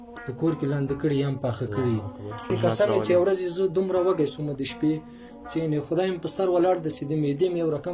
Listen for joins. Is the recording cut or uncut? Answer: cut